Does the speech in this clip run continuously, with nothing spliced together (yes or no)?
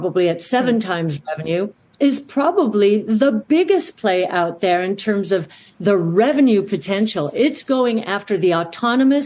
yes